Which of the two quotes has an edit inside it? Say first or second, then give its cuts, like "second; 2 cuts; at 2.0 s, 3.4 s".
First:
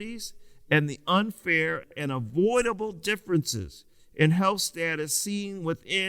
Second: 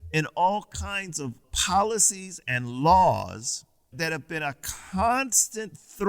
second; 1 cut; at 1.5 s